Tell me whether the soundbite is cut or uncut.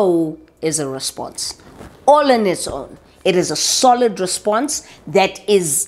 uncut